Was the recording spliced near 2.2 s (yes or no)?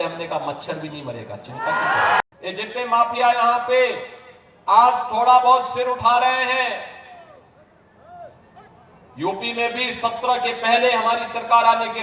yes